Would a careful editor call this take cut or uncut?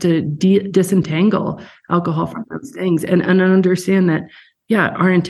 uncut